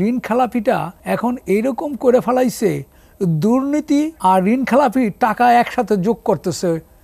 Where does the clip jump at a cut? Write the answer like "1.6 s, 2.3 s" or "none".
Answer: 0.9 s, 4.1 s